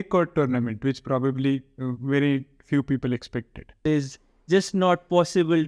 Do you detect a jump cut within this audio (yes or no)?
yes